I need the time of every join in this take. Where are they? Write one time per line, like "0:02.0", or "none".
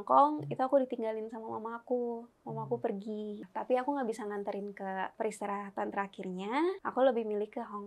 0:03.4
0:05.1
0:06.8